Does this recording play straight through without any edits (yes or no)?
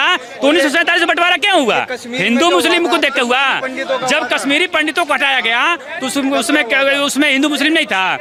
yes